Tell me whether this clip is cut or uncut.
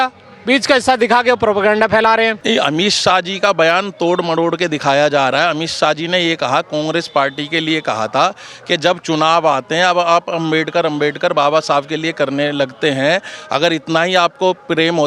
cut